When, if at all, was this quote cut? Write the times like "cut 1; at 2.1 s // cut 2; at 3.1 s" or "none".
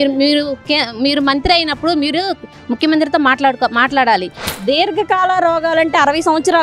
cut 1; at 4.4 s

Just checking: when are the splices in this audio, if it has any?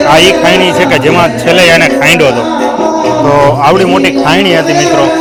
none

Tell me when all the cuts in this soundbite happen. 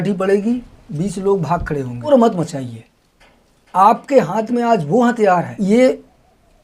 cut 1; at 2.1 s // cut 2; at 5.5 s

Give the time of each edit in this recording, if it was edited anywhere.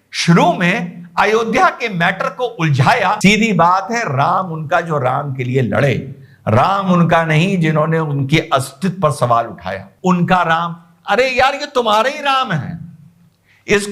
cut 1; at 3.2 s // cut 2; at 9.8 s

